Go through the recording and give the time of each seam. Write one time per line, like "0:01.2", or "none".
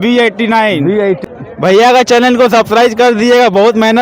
0:01.0